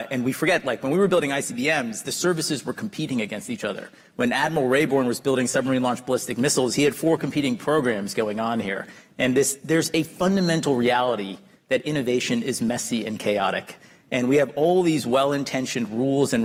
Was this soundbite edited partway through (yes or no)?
no